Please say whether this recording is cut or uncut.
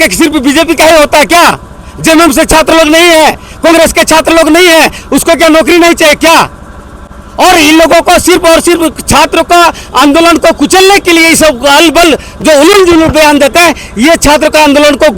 uncut